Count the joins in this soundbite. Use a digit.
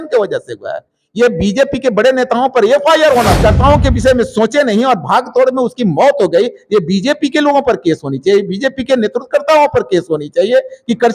1